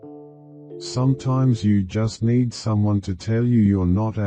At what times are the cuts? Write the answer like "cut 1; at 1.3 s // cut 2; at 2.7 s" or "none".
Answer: none